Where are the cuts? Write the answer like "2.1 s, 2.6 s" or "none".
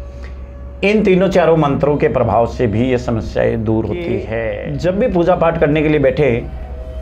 4.6 s